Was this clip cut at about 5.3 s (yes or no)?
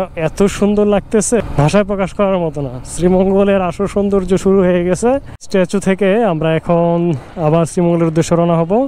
yes